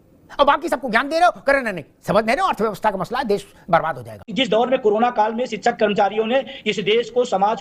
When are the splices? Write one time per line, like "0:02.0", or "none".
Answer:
0:04.3